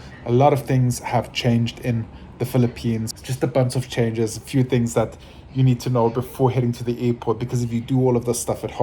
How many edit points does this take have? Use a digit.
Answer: 1